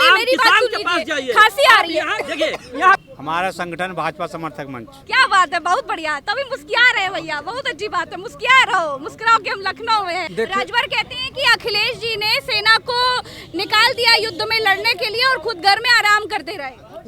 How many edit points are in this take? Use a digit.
2